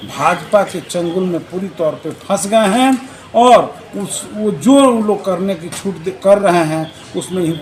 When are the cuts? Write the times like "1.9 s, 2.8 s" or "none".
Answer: none